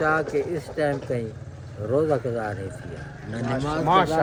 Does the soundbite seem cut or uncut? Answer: uncut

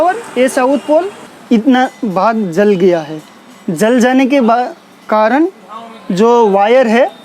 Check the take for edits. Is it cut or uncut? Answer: cut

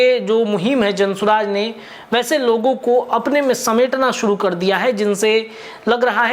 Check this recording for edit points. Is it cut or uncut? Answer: uncut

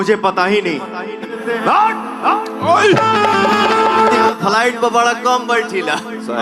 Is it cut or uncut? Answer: cut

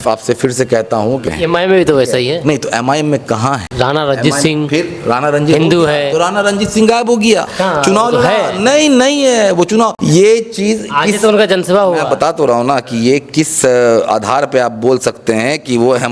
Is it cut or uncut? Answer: cut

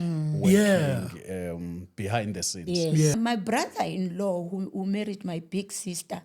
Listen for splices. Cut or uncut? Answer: cut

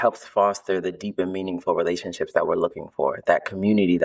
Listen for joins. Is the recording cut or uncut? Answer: uncut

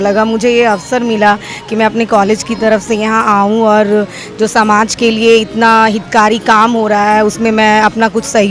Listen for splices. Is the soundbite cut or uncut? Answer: uncut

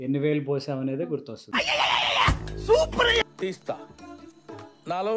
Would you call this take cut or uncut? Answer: cut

